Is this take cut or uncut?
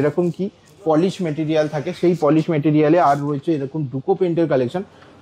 uncut